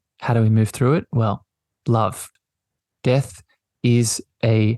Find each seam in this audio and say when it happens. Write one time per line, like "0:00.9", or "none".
0:02.2